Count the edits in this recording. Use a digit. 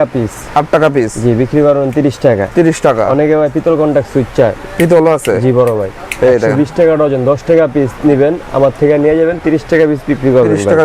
0